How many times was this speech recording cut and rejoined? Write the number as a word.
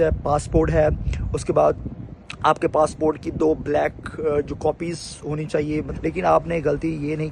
one